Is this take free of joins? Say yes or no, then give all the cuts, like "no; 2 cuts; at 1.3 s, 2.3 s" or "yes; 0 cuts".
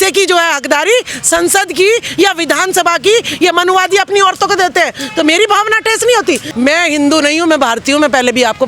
no; 1 cut; at 6.5 s